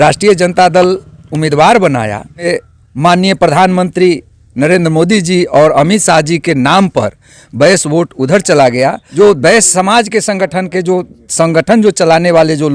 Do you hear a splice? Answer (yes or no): yes